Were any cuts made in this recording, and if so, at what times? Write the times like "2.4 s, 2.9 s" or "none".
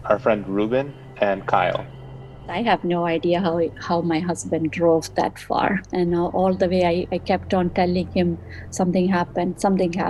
2.5 s, 5.9 s